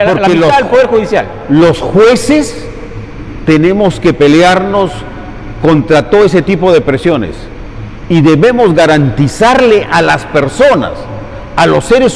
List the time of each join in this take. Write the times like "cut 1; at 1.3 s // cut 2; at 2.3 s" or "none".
none